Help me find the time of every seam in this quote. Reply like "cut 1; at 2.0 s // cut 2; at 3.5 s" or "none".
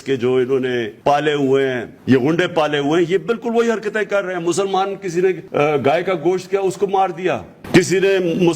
cut 1; at 0.9 s // cut 2; at 1.9 s // cut 3; at 5.4 s